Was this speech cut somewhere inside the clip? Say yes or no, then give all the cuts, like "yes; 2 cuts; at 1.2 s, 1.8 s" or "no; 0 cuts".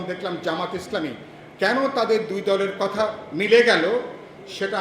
no; 0 cuts